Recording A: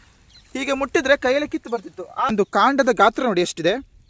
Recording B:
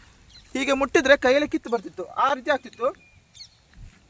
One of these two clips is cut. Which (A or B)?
A